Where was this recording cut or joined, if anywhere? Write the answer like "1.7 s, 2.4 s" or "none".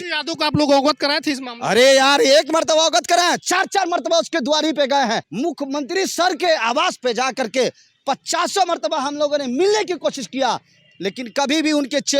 5.3 s